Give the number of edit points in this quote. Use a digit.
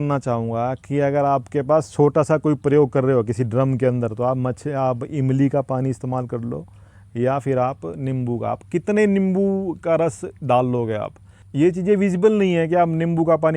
0